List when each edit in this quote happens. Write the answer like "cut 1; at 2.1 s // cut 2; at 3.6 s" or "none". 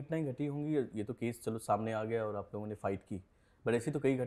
none